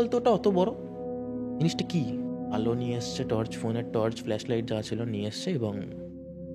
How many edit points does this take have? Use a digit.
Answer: 1